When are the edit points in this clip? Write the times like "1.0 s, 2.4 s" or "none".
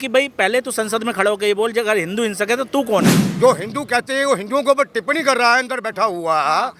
3.1 s